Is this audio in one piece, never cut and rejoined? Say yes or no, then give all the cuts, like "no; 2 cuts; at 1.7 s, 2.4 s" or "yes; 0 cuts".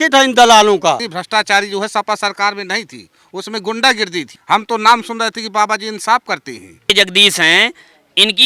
no; 3 cuts; at 1.1 s, 4.3 s, 6.9 s